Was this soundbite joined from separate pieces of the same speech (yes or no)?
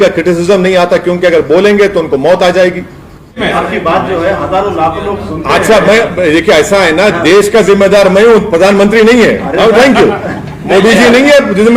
yes